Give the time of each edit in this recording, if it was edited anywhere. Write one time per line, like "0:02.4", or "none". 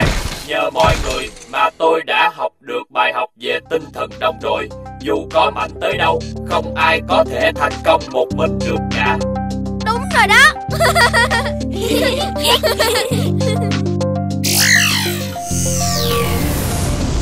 none

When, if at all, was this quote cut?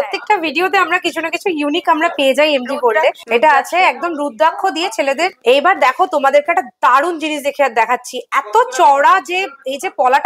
0:03.2
0:05.3

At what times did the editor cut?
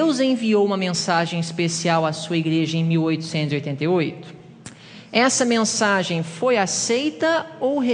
0:01.1

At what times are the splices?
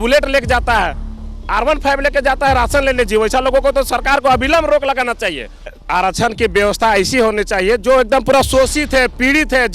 0:05.8

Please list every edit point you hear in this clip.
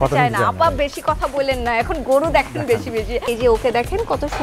0:03.3

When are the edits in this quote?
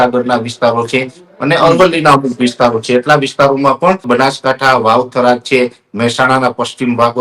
0:04.0

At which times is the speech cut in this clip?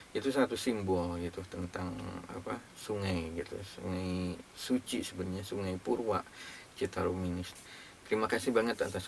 0:07.5

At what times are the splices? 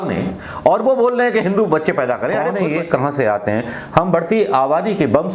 0:02.5

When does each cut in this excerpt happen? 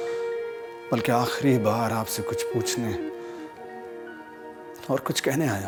none

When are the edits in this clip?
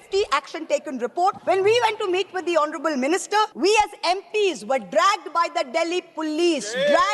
0:01.4
0:03.5

